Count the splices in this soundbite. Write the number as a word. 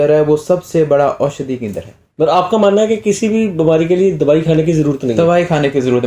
one